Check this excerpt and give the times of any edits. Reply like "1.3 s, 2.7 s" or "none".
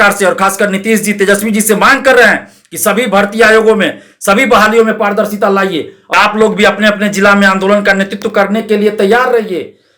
5.9 s